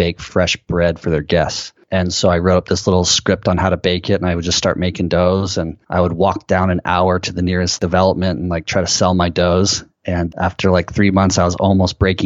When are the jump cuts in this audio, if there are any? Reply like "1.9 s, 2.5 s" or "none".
7.7 s, 10.3 s